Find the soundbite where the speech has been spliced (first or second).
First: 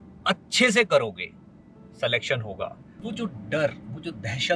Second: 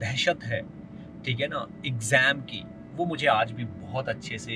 first